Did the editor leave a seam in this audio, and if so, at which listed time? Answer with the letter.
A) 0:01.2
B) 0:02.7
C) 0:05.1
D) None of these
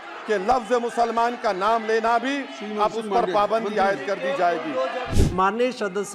C